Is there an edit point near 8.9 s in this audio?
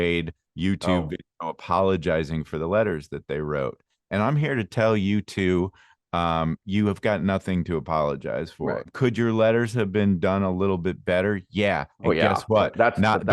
yes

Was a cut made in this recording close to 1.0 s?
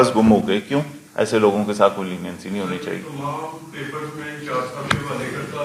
yes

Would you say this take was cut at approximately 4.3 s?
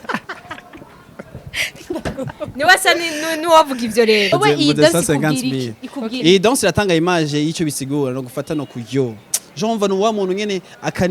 yes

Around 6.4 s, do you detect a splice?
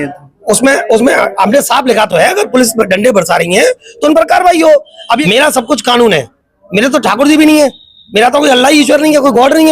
no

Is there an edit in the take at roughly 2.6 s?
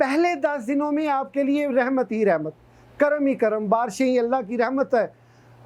no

